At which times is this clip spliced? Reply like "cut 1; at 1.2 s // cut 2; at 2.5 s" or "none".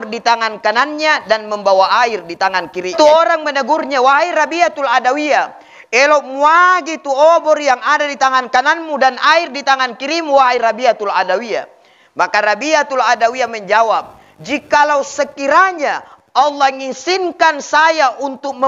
cut 1; at 2.9 s